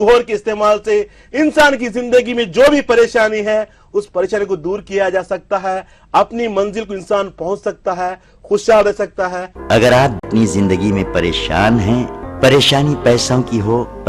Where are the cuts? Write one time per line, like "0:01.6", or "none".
0:09.4
0:10.2